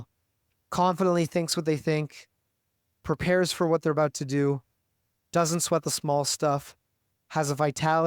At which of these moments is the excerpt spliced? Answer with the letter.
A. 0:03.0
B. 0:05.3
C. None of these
A